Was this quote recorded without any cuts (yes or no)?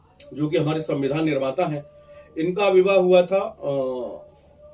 yes